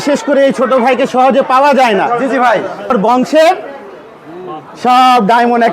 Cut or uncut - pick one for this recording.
cut